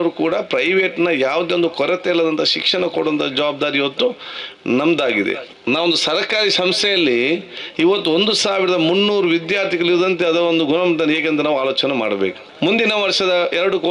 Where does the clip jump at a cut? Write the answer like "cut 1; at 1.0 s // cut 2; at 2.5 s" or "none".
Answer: cut 1; at 5.5 s // cut 2; at 12.4 s